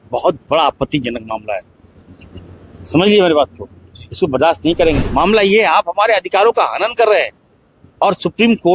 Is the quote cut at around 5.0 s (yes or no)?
yes